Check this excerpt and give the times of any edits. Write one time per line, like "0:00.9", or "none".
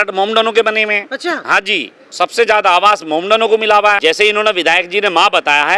0:02.0
0:04.0